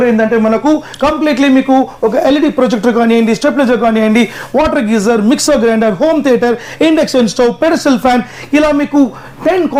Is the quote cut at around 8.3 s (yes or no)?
no